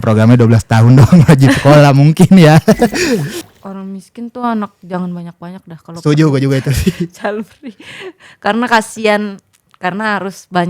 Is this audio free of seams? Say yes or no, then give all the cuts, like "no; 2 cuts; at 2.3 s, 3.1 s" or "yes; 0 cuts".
no; 1 cut; at 3.4 s